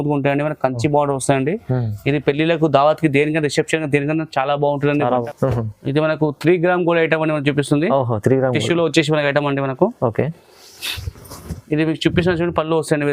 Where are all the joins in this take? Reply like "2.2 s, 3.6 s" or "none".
5.3 s